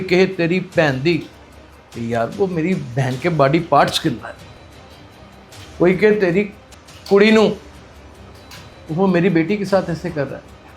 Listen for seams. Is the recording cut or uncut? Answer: cut